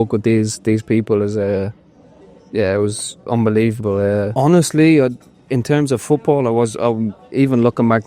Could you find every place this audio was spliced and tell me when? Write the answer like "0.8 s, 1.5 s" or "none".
4.3 s